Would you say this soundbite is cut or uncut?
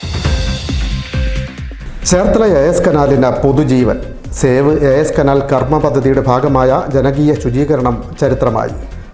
cut